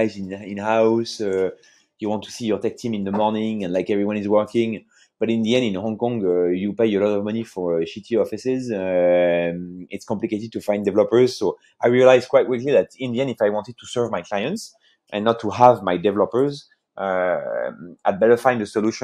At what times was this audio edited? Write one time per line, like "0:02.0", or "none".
none